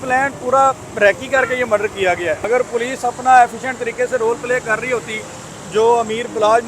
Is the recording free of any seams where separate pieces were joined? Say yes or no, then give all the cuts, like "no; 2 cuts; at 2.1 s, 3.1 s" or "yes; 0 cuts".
no; 1 cut; at 2.4 s